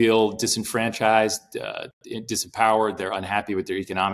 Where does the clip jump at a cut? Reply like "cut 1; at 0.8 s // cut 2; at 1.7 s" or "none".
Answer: none